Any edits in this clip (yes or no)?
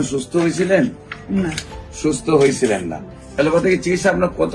yes